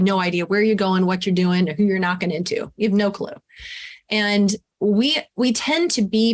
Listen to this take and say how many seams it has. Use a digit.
0